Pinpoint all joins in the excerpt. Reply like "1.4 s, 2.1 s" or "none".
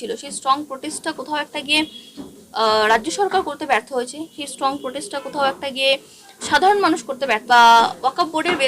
7.4 s